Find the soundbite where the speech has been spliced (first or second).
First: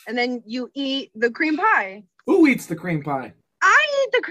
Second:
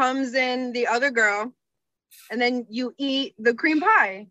first